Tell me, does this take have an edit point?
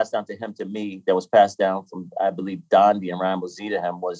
no; 0 cuts

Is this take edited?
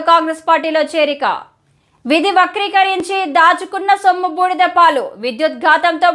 yes; 1 cut; at 2.1 s

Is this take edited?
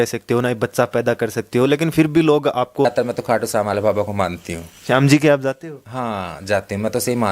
yes; 1 cut; at 2.9 s

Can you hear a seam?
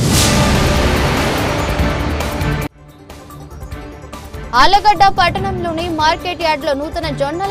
no; 0 cuts

